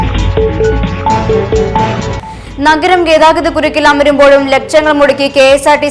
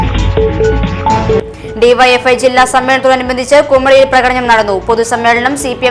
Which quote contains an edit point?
second; 1 cut; at 1.4 s

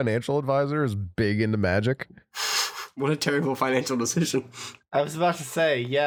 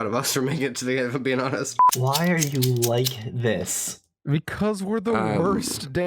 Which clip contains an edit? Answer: second; 1 cut; at 2.0 s

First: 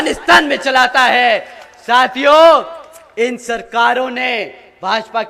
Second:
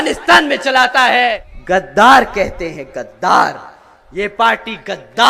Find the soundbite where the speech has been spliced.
second; 1 cut; at 1.5 s

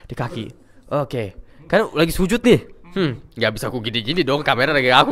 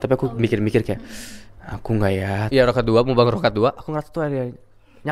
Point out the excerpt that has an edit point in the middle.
second; 1 cut; at 2.5 s

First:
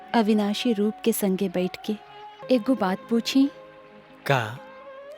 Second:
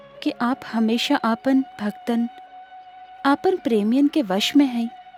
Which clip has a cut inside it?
first; 1 cut; at 2.3 s

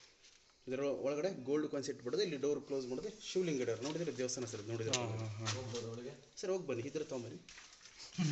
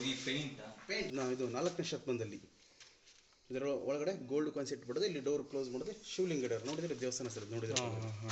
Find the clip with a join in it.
second; 1 cut; at 1.1 s

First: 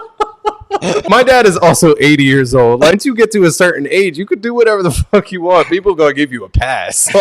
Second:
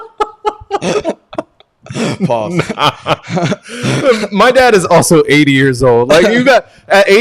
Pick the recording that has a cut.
first; 2 cuts; at 1.0 s, 2.9 s

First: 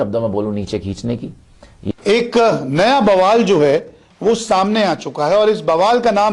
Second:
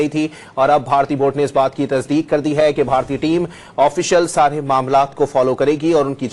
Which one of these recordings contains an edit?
first; 1 cut; at 1.9 s

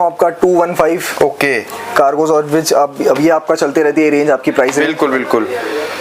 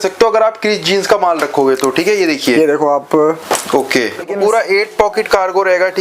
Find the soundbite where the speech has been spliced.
second; 1 cut; at 4.3 s

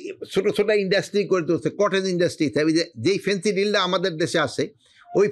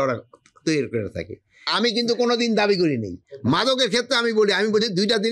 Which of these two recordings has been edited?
second; 1 cut; at 1.6 s

